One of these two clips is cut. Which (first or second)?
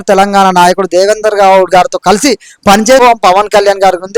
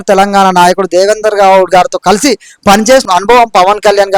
first